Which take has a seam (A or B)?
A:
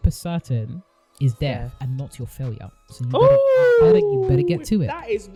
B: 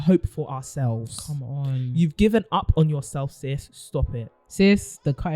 B